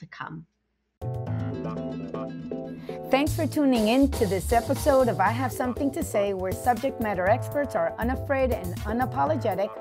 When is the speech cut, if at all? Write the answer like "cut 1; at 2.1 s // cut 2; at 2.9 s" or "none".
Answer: cut 1; at 1.3 s